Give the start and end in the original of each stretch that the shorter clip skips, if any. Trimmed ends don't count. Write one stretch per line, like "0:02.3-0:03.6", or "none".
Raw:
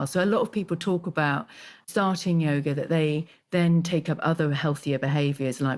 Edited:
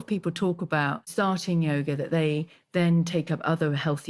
0:01.5-0:01.8